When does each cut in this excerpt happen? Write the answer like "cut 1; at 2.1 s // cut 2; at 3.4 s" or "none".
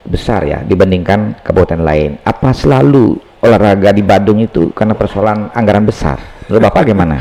none